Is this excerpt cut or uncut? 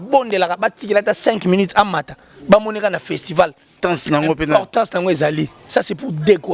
cut